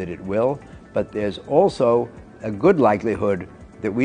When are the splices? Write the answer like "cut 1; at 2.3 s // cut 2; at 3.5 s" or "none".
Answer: none